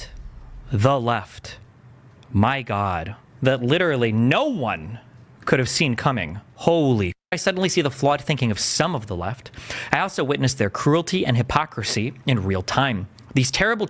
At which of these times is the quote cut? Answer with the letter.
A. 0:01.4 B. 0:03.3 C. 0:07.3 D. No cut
C